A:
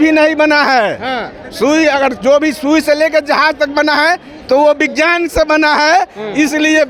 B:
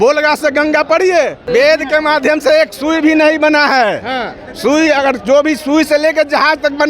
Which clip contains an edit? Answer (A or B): B